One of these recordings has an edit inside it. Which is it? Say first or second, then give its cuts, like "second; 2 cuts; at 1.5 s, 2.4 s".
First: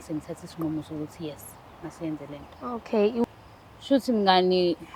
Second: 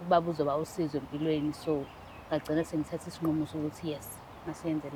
first; 1 cut; at 3.2 s